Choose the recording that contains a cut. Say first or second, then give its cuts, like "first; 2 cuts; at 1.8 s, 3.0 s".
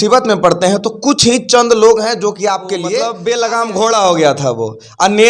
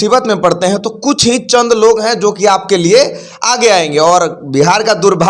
first; 1 cut; at 2.8 s